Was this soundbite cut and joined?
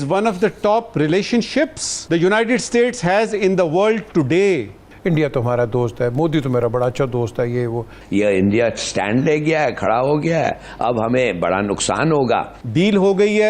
yes; 4 cuts; at 1.9 s, 4.8 s, 7.9 s, 12.6 s

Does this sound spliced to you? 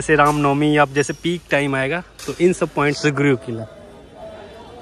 yes; 1 cut; at 3.0 s

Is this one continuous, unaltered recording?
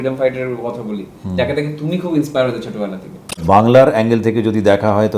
no; 1 cut; at 3.6 s

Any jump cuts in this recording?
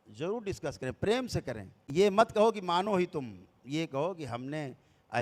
no; 0 cuts

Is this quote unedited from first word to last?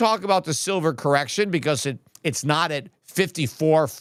yes; 0 cuts

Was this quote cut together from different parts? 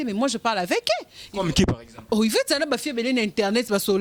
no; 0 cuts

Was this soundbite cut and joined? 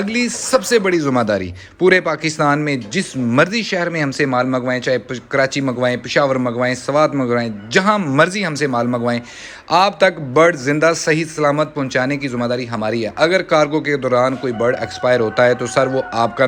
no; 0 cuts

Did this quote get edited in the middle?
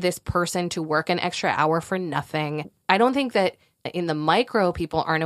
yes; 2 cuts; at 2.6 s, 3.9 s

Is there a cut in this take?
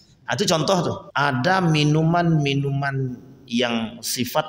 yes; 1 cut; at 1.0 s

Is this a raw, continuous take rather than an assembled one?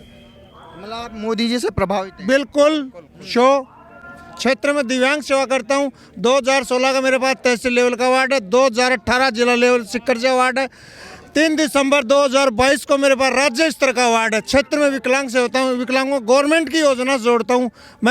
yes; 0 cuts

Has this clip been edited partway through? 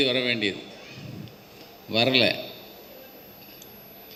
no; 0 cuts

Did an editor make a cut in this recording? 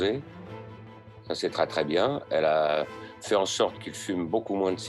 no; 0 cuts

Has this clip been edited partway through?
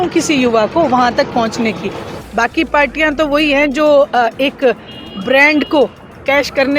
yes; 1 cut; at 2.1 s

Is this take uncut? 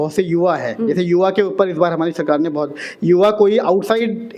yes; 0 cuts

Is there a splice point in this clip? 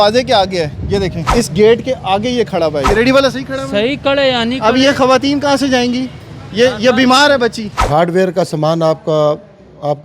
yes; 3 cuts; at 1.2 s, 2.9 s, 7.8 s

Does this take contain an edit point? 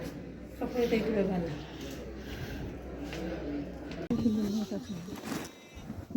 yes; 1 cut; at 4.1 s

